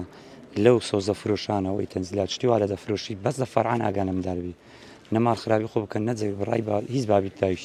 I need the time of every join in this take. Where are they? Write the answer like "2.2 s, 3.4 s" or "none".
none